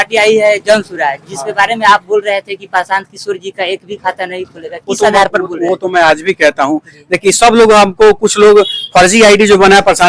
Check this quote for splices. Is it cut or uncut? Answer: uncut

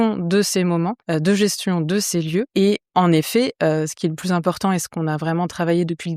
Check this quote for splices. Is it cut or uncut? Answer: cut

